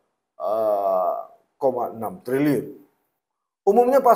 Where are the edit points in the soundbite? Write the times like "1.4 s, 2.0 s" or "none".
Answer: none